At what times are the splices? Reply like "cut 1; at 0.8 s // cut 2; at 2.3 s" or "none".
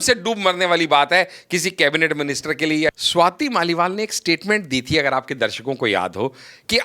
cut 1; at 2.9 s